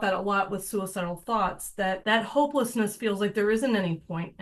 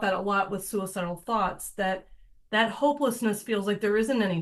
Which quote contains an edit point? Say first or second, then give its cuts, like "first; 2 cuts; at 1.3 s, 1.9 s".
first; 1 cut; at 2.0 s